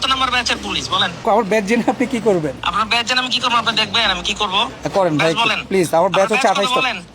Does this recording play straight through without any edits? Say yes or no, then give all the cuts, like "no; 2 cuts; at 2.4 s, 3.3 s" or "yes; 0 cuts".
no; 3 cuts; at 1.2 s, 2.6 s, 5.6 s